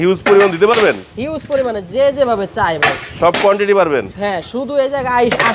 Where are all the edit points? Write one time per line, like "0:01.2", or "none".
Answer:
none